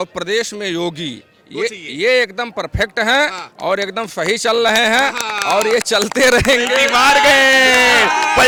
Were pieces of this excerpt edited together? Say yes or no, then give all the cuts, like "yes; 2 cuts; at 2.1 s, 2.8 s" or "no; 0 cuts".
no; 0 cuts